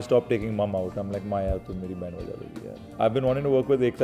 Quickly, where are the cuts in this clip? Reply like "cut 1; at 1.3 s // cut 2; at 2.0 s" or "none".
cut 1; at 2.9 s